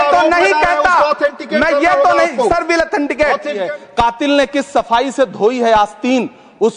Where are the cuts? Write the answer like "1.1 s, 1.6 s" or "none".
3.6 s